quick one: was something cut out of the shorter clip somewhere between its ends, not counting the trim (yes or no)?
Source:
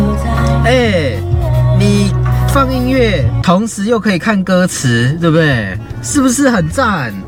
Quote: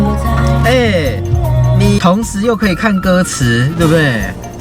yes